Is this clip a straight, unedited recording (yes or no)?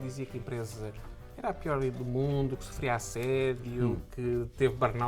yes